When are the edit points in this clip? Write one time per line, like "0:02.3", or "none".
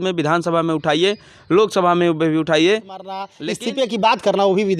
0:03.3